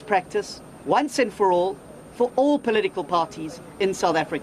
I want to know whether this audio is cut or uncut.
uncut